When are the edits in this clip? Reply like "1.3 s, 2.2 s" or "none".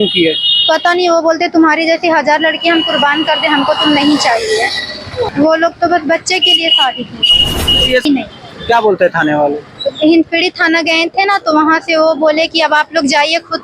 5.3 s, 8.1 s